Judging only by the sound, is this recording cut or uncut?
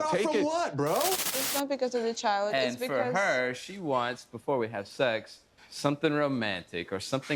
cut